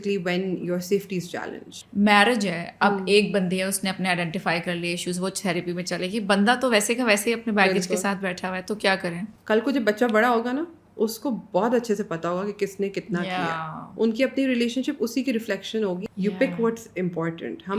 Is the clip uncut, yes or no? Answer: no